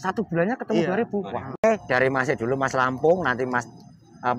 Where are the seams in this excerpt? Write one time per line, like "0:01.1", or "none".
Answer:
0:01.6